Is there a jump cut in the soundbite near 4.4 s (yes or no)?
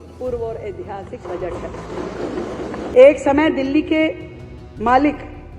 no